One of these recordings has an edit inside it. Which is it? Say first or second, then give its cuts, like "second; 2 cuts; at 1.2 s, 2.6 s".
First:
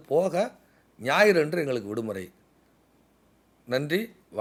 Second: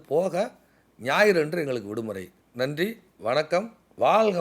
second; 1 cut; at 2.4 s